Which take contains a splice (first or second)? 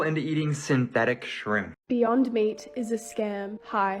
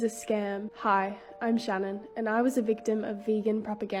first